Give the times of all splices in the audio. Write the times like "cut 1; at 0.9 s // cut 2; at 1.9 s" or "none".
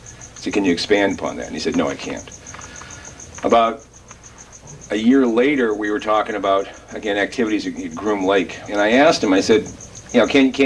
cut 1; at 8.8 s

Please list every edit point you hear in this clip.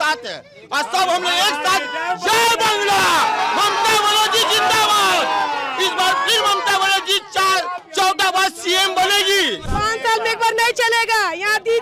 cut 1; at 9.6 s

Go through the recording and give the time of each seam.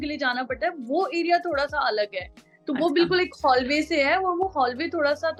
none

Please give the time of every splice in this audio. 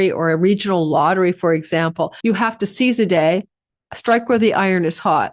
cut 1; at 2.1 s

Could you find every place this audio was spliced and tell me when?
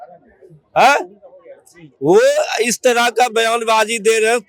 none

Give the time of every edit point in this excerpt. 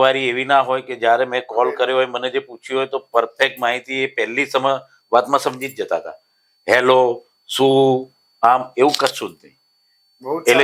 none

